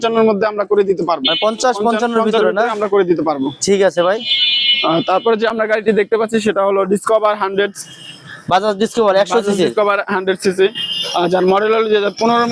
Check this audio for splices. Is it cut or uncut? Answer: uncut